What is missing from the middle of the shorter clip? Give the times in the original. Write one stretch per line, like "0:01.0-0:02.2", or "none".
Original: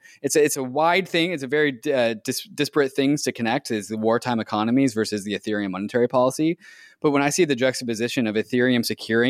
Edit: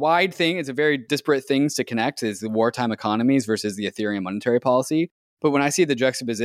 0:01.8-0:02.5
0:06.7-0:06.8